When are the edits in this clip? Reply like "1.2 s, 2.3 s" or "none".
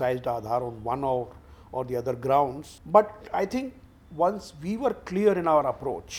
2.7 s